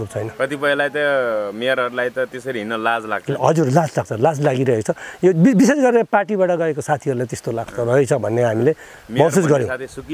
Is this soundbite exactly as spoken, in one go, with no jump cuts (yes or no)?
yes